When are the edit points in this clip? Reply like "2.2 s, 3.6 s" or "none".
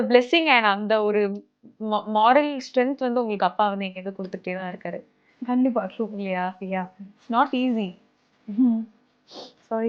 7.1 s